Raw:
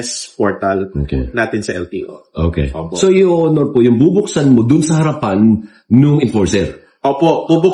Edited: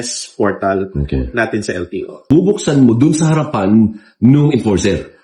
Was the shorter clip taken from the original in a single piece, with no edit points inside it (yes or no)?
no